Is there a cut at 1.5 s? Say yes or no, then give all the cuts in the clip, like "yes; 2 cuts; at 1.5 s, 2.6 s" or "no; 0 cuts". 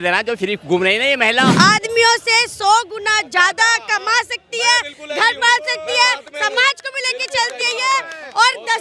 yes; 1 cut; at 1.5 s